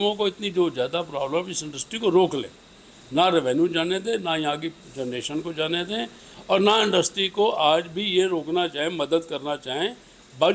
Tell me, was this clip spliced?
no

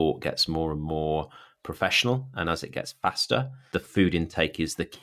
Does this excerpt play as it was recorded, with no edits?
no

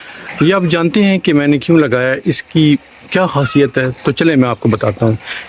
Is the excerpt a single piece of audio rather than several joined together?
yes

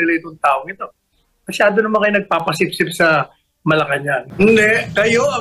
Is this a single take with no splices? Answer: no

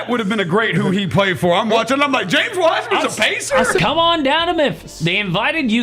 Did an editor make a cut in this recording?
yes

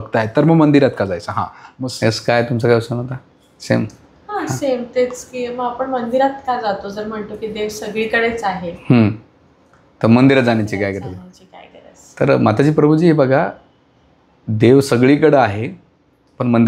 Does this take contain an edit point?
no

